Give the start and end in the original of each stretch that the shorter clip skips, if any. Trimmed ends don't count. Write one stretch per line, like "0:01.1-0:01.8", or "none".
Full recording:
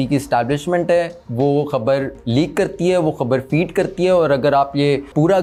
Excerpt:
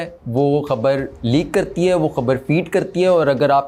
none